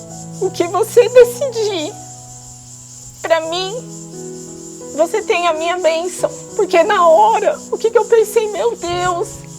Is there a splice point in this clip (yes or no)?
yes